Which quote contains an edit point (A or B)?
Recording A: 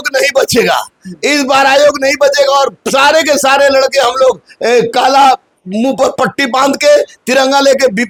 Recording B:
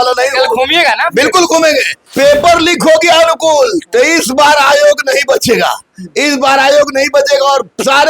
B